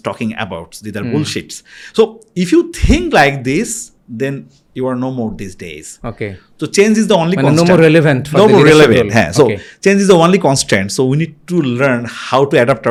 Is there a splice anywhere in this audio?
no; 0 cuts

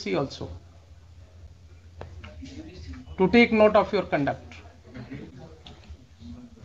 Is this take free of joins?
yes; 0 cuts

